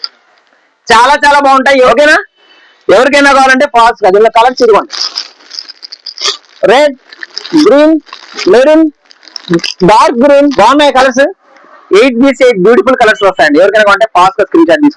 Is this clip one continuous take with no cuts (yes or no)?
no